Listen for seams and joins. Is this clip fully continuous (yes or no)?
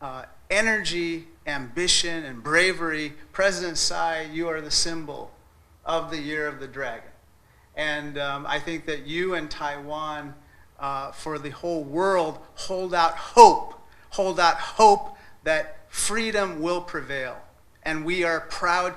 yes